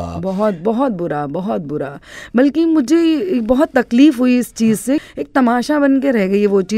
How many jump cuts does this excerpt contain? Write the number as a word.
one